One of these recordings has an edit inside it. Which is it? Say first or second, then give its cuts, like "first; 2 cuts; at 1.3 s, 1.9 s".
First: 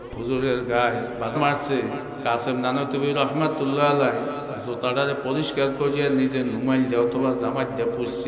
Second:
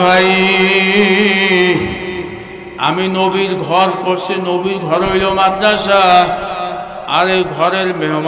first; 1 cut; at 1.4 s